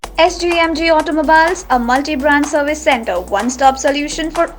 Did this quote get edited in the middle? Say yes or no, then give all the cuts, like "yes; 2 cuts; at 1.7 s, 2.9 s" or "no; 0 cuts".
no; 0 cuts